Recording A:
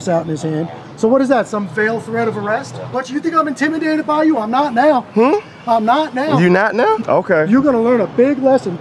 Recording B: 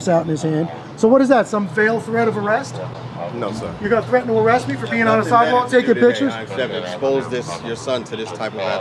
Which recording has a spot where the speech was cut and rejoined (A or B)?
A